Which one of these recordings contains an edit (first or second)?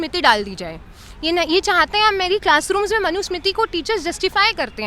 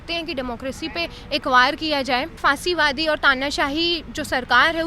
second